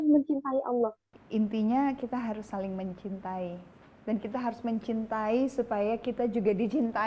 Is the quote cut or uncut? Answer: cut